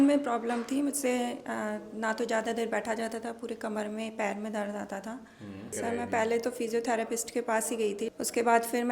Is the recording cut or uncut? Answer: cut